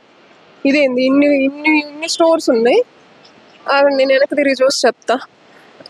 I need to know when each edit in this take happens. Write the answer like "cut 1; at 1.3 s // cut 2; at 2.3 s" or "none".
none